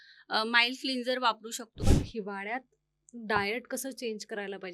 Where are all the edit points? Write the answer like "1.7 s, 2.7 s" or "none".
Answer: 1.8 s